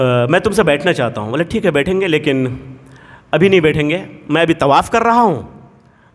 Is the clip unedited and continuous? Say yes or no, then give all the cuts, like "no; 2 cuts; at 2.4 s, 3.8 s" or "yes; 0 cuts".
yes; 0 cuts